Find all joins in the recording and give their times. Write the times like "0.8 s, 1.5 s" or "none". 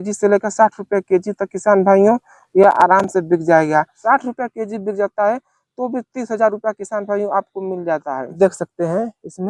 4.0 s, 8.3 s